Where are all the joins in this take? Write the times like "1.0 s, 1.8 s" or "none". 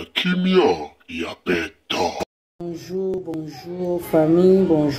2.4 s